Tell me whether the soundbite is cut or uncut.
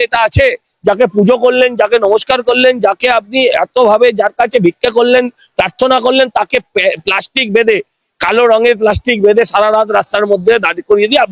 uncut